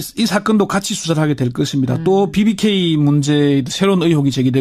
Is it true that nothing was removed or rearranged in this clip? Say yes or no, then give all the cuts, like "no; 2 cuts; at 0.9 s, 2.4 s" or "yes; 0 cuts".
yes; 0 cuts